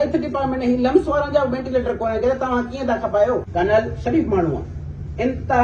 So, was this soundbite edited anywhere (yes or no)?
yes